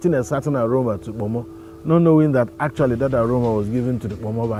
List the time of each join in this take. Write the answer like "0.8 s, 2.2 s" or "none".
none